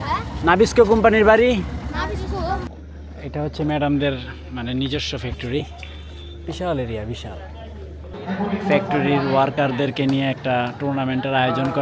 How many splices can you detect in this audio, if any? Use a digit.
2